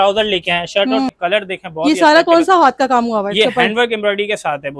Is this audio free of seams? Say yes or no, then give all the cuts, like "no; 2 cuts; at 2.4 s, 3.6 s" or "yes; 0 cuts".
no; 1 cut; at 1.1 s